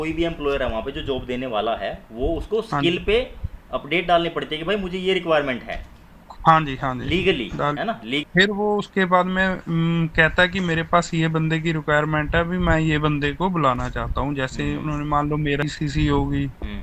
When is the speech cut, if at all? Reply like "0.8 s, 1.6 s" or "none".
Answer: 8.2 s, 15.6 s